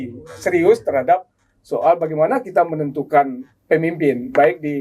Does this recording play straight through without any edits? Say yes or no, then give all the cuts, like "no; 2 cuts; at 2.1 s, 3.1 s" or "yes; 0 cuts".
yes; 0 cuts